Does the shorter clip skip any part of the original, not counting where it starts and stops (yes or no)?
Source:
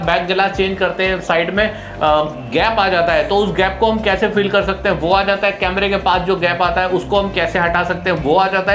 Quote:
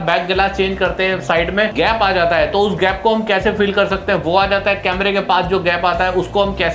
yes